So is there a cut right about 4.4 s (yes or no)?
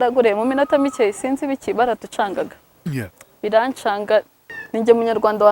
yes